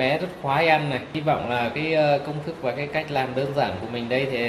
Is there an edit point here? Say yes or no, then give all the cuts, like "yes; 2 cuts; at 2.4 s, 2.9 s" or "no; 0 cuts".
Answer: yes; 1 cut; at 1.1 s